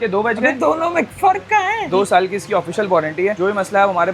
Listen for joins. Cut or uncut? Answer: cut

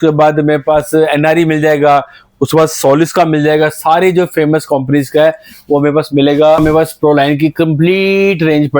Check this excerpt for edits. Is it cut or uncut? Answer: cut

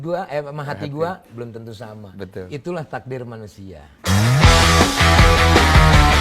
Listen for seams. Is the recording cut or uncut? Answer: cut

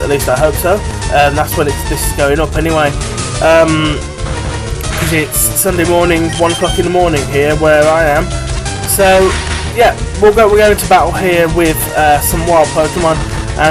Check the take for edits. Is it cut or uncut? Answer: cut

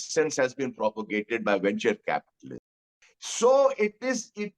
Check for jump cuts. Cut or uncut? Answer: cut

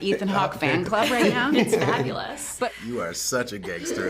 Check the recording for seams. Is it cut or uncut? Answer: cut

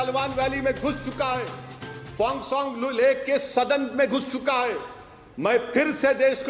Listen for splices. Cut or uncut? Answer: uncut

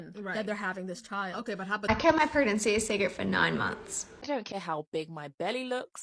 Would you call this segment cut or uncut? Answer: cut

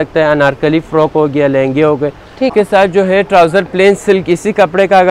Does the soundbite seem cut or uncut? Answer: cut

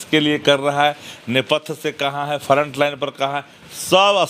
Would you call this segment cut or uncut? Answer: uncut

